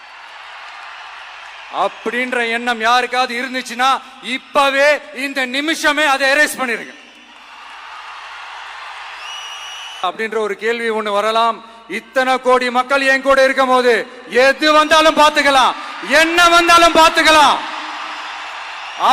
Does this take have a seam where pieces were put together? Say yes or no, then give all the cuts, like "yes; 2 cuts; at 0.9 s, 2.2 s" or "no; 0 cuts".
yes; 1 cut; at 10.0 s